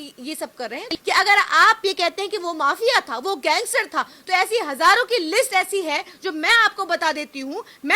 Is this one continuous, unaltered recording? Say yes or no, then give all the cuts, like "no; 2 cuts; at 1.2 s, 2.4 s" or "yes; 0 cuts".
no; 1 cut; at 0.9 s